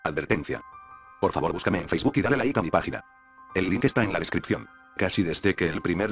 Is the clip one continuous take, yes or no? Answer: no